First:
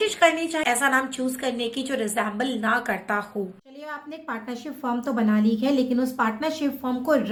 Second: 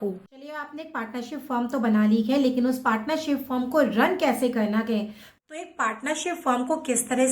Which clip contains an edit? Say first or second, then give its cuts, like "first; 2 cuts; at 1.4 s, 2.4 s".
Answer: second; 1 cut; at 5.3 s